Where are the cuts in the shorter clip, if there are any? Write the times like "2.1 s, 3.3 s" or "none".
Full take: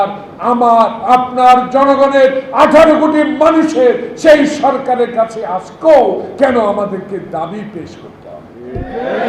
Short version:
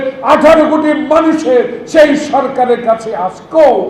none